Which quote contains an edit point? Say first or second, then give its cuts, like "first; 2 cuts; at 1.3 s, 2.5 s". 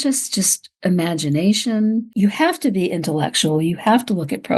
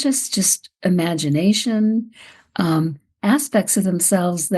first; 1 cut; at 2.1 s